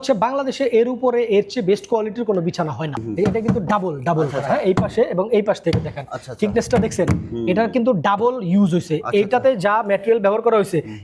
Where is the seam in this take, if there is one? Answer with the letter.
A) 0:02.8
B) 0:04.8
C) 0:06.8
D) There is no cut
A